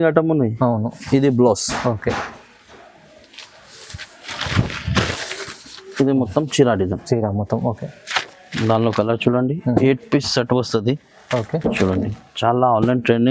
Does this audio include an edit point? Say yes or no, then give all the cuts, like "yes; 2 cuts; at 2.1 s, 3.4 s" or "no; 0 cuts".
no; 0 cuts